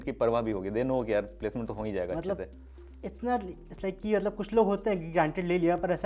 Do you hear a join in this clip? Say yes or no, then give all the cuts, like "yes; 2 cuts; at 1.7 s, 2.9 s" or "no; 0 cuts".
no; 0 cuts